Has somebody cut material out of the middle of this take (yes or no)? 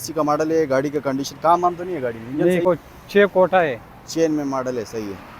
yes